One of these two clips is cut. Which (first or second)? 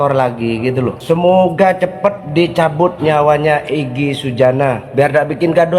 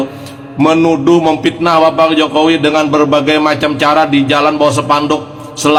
first